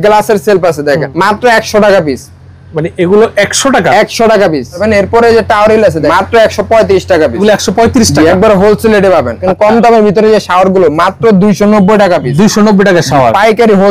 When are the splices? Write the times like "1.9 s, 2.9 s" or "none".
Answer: 1.1 s, 4.8 s, 6.1 s, 7.4 s, 9.5 s